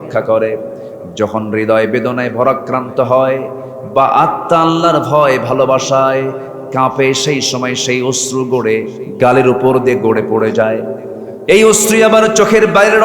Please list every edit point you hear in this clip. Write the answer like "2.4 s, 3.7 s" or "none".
9.0 s

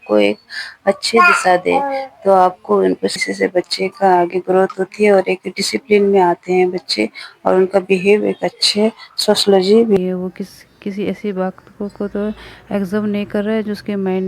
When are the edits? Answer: 3.3 s, 10.0 s

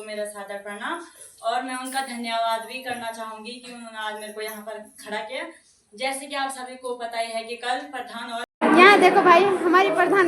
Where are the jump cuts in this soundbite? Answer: 8.5 s

